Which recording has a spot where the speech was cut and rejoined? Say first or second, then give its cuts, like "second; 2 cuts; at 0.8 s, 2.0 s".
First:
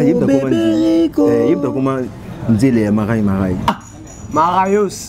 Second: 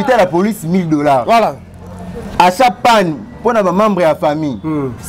first; 1 cut; at 3.7 s